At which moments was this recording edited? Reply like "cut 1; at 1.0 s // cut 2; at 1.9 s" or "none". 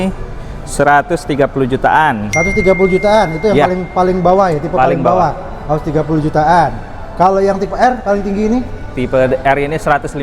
none